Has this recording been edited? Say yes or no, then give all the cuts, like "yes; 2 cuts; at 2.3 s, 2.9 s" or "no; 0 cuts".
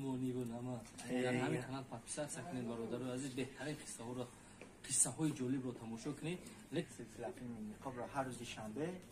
yes; 1 cut; at 6.9 s